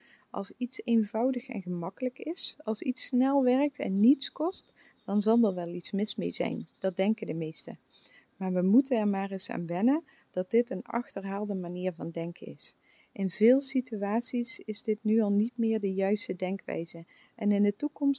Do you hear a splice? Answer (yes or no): no